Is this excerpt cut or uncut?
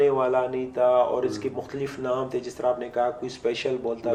uncut